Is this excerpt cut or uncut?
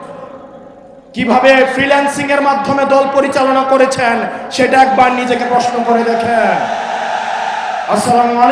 uncut